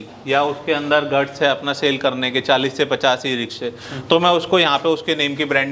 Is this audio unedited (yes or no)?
yes